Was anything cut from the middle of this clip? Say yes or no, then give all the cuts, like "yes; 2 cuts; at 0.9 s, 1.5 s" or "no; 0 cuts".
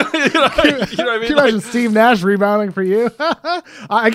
no; 0 cuts